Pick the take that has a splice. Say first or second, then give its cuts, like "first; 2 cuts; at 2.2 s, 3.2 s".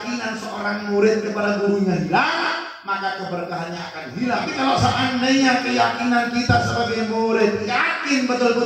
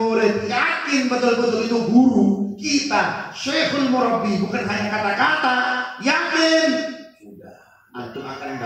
first; 1 cut; at 4.4 s